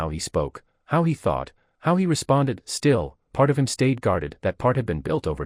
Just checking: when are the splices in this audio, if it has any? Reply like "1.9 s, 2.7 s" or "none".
none